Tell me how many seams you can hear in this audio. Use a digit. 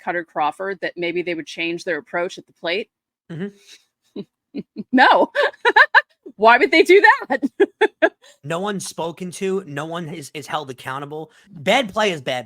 1